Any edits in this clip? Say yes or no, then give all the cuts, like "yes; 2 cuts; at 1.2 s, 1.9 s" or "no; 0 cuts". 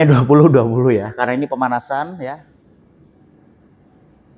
yes; 1 cut; at 2.2 s